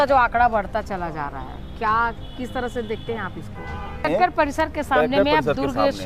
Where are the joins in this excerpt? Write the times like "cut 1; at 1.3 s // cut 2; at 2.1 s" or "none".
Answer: cut 1; at 4.0 s